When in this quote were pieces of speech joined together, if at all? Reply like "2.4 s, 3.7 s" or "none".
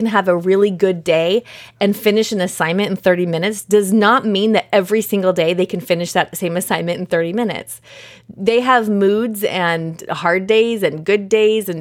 none